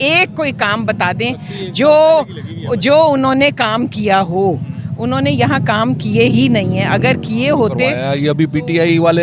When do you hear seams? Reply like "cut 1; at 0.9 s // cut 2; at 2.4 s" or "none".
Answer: cut 1; at 8.0 s